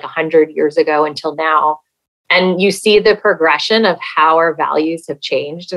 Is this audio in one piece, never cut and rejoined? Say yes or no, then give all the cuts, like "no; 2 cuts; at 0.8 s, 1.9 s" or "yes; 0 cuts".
yes; 0 cuts